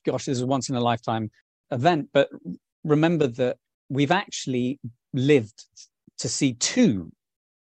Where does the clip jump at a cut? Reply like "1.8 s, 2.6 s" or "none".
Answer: 1.7 s